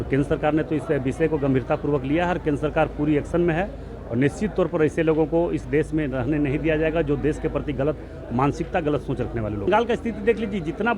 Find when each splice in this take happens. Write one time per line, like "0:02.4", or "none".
0:09.7